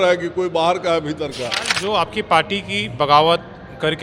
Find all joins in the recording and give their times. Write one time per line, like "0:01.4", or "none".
0:01.7